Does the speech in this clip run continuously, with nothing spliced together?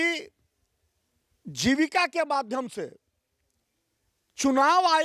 yes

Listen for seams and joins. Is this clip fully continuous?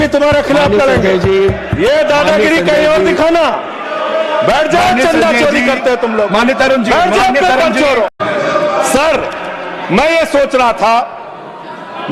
no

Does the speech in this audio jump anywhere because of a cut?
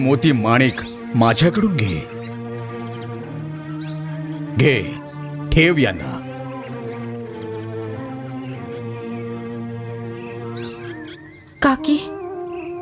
yes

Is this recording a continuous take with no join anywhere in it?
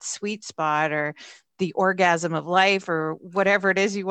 yes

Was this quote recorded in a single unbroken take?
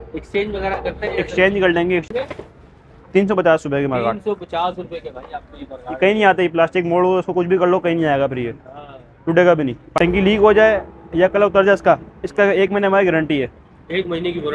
no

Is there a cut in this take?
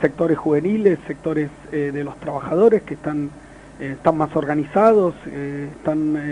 yes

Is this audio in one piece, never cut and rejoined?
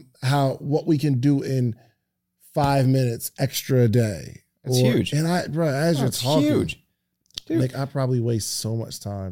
yes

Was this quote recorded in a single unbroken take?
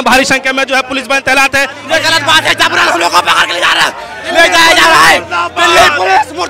no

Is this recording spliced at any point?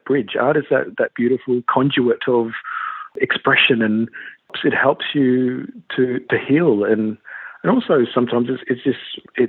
yes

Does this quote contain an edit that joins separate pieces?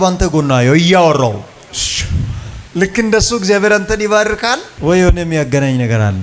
no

